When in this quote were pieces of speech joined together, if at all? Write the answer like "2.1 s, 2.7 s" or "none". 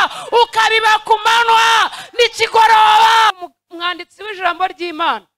3.4 s

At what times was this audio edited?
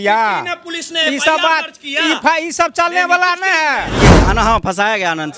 3.9 s

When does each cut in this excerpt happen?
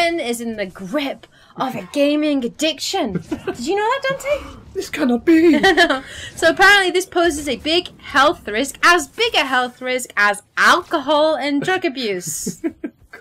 8.9 s

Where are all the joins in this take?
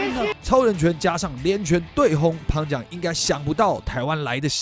none

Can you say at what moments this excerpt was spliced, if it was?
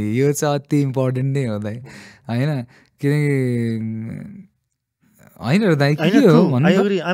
none

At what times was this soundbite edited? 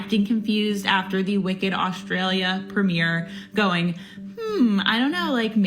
none

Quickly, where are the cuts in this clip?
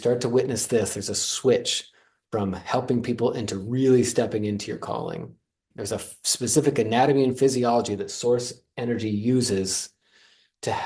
5.7 s

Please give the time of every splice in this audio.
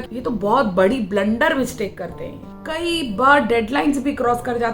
2.6 s

